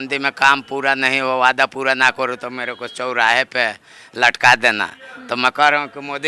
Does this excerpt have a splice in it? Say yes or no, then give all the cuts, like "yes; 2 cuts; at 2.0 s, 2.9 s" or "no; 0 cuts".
no; 0 cuts